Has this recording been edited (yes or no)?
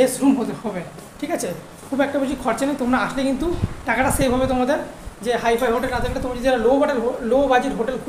no